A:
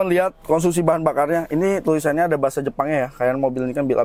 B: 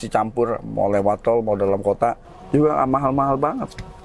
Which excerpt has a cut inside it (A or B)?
B